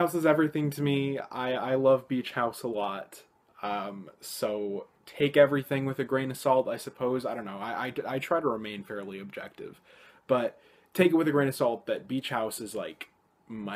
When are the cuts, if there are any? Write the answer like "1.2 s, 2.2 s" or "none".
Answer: 12.5 s